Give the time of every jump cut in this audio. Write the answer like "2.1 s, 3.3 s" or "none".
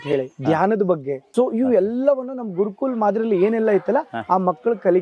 1.2 s